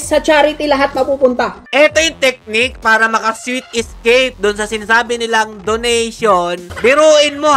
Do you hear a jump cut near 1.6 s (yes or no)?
yes